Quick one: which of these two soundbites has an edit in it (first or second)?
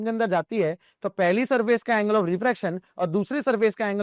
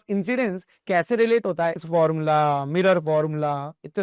second